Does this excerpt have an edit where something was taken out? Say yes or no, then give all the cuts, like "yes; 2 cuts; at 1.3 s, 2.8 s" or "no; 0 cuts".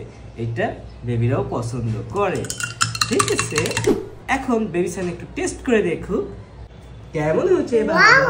yes; 1 cut; at 4.0 s